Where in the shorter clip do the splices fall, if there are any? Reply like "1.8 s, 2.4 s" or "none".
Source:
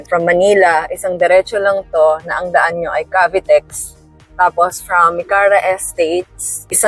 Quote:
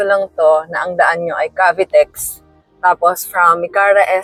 none